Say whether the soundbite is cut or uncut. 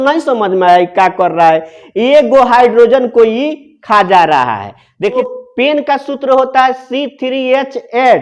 cut